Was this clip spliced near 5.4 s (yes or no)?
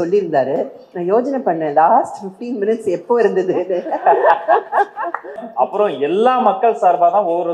yes